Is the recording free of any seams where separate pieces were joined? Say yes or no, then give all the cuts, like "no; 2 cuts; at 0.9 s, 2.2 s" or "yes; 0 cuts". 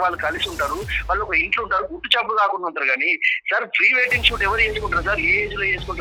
yes; 0 cuts